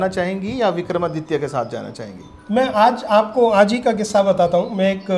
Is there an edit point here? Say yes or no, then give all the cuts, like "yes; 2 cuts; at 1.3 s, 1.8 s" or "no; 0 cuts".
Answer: no; 0 cuts